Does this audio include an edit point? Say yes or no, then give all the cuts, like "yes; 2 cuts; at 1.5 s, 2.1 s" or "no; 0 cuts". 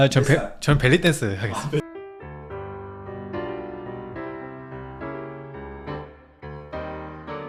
no; 0 cuts